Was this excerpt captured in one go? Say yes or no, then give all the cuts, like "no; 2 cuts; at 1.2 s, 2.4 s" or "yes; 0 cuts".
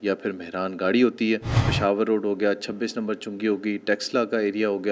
no; 1 cut; at 1.6 s